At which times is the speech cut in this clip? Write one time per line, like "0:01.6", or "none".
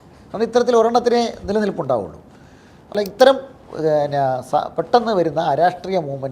0:02.9